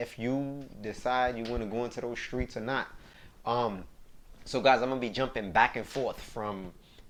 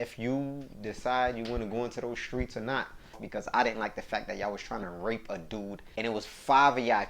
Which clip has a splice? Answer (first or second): second